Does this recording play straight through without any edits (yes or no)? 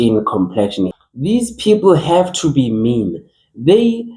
no